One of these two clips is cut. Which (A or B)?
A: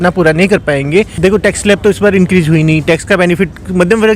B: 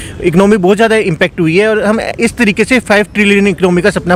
A